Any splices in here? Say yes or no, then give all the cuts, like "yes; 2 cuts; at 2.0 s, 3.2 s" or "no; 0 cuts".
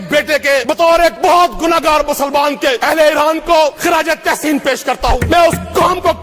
yes; 4 cuts; at 0.9 s, 2.8 s, 3.8 s, 5.2 s